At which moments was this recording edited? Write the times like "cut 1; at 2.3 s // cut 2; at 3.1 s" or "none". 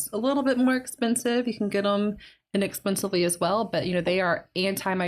none